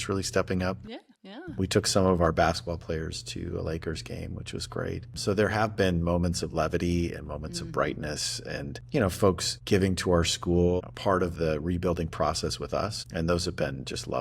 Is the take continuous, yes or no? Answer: no